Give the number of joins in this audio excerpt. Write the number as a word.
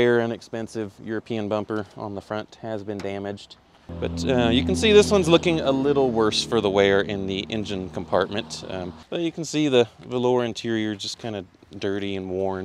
two